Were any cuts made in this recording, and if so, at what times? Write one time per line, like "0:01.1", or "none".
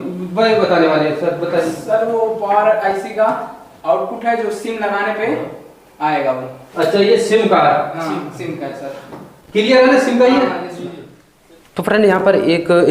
0:11.3